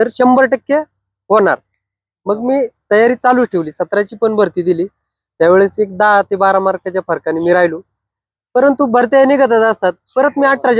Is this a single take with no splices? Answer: yes; 0 cuts

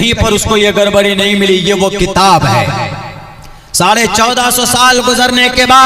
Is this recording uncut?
yes; 0 cuts

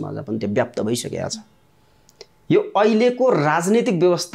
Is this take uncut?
yes; 0 cuts

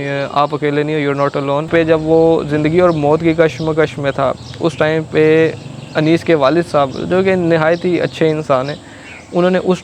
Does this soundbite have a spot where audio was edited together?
yes; 1 cut; at 1.7 s

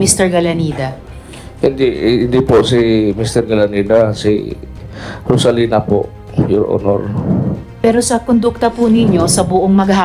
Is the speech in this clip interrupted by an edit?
no; 0 cuts

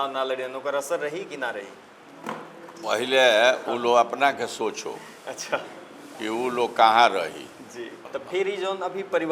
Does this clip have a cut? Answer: yes; 1 cut; at 8.0 s

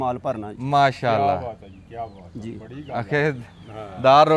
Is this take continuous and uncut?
yes; 0 cuts

